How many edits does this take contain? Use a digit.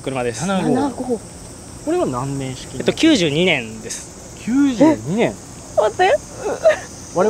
0